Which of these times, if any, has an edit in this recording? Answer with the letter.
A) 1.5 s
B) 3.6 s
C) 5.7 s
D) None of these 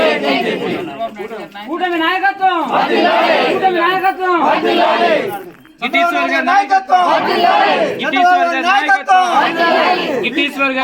D